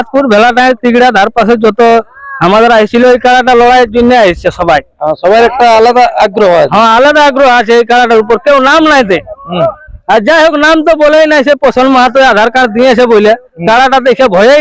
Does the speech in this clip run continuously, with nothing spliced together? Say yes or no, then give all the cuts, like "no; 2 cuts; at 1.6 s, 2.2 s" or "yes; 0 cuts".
yes; 0 cuts